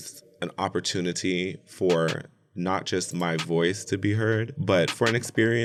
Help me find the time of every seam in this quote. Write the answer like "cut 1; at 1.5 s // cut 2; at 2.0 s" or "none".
none